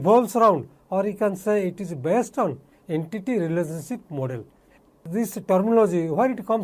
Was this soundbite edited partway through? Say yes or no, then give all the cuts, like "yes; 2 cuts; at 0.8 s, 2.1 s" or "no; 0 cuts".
yes; 2 cuts; at 2.7 s, 5.0 s